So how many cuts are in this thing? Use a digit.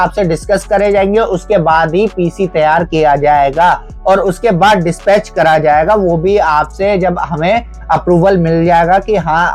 0